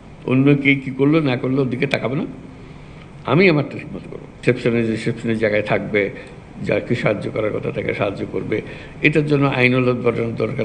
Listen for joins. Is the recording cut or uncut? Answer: cut